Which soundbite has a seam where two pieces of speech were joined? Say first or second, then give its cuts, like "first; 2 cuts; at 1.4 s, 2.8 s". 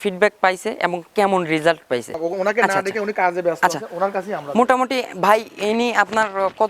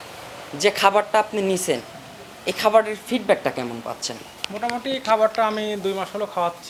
first; 1 cut; at 2.1 s